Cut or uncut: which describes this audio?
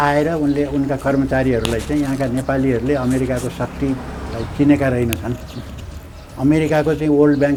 uncut